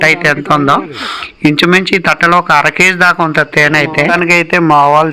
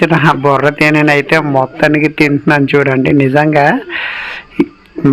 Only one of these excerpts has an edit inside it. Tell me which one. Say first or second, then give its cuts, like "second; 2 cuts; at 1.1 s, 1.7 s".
first; 1 cut; at 4.1 s